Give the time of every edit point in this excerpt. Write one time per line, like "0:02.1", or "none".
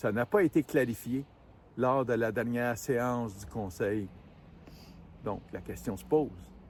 none